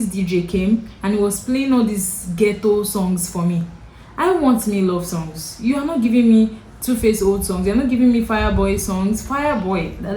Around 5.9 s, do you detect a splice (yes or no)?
no